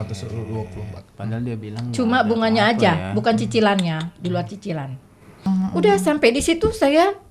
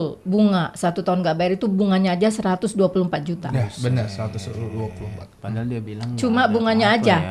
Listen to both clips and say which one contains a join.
first; 1 cut; at 5.4 s

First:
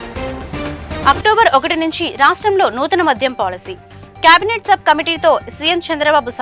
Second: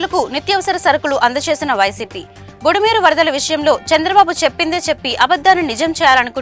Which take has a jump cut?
first; 1 cut; at 1.0 s

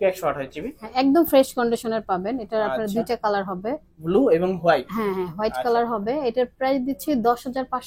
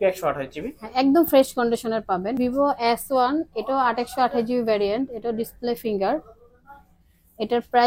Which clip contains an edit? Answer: second; 1 cut; at 2.4 s

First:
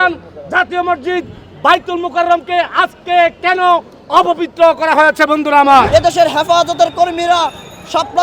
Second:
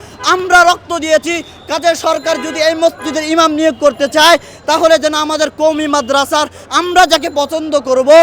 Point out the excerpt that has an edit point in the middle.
first; 1 cut; at 5.9 s

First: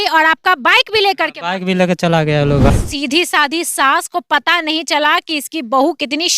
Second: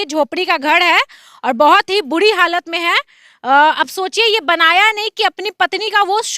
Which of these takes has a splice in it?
first; 1 cut; at 2.9 s

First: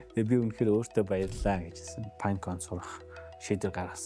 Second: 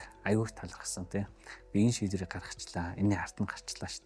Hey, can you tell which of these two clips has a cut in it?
first; 1 cut; at 2.0 s

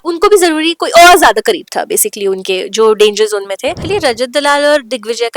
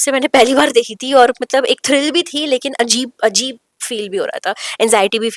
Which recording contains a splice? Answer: first; 1 cut; at 3.8 s

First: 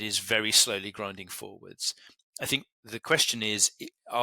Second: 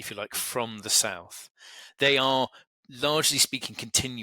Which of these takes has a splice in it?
second; 1 cut; at 1.8 s

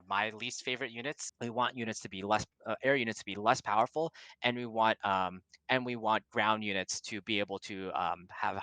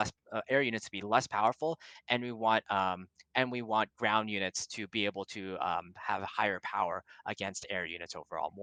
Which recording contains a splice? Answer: first; 1 cut; at 1.2 s

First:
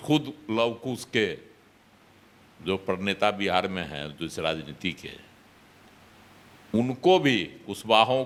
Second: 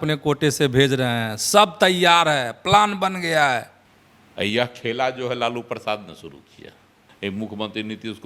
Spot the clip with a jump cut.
second; 2 cuts; at 3.7 s, 7.2 s

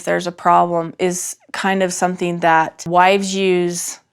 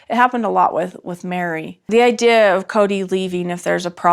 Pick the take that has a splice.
second; 1 cut; at 1.7 s

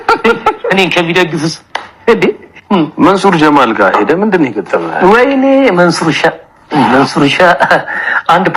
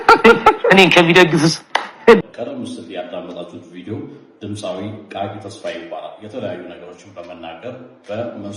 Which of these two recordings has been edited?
second; 1 cut; at 2.2 s

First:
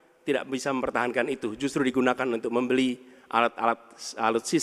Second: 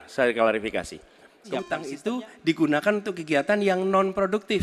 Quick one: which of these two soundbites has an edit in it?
second; 1 cut; at 1.4 s

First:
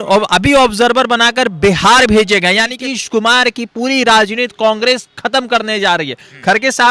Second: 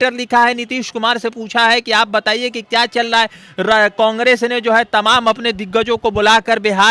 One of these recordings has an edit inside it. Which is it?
first; 1 cut; at 2.7 s

